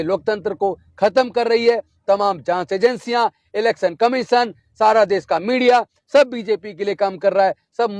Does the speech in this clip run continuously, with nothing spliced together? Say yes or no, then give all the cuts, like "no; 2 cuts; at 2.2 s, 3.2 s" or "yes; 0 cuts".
yes; 0 cuts